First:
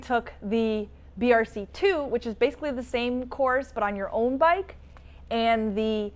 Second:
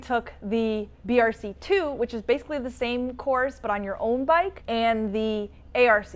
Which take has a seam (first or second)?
second